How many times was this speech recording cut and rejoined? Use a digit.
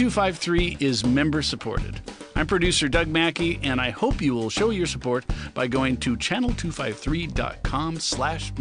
0